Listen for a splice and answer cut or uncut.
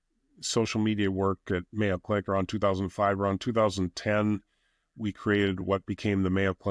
uncut